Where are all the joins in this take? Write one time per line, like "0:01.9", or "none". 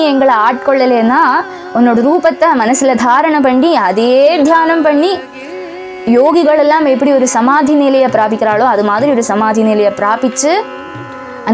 none